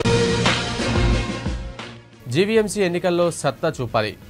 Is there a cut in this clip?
yes; 1 cut; at 1.6 s

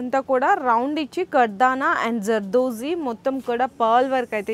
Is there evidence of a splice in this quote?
no; 0 cuts

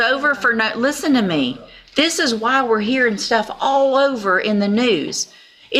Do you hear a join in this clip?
no; 0 cuts

